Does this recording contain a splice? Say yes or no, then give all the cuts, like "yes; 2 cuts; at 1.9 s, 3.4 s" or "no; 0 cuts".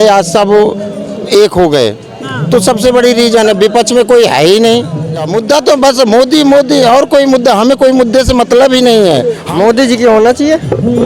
yes; 2 cuts; at 5.3 s, 9.4 s